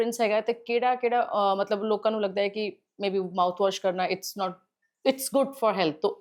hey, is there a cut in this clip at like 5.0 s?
no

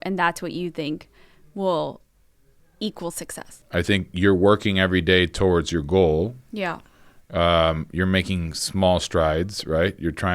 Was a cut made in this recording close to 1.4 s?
no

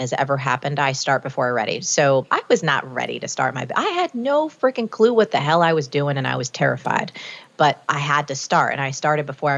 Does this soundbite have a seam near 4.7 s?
no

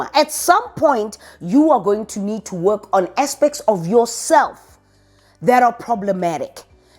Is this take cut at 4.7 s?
no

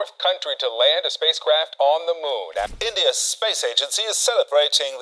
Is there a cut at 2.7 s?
yes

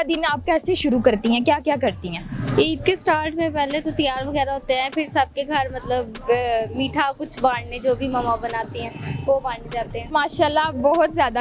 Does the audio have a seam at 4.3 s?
no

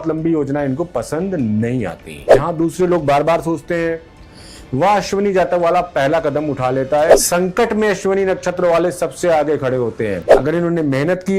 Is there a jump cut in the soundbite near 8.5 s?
no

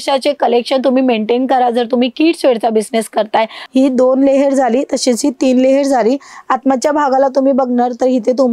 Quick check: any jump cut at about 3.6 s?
yes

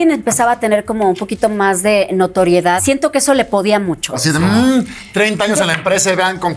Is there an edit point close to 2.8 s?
yes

